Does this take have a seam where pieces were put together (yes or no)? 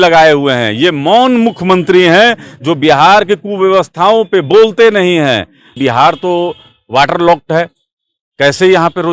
yes